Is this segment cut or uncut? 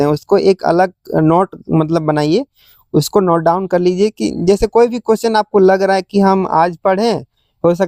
uncut